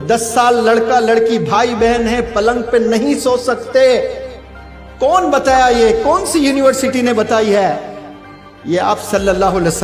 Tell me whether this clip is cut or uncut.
uncut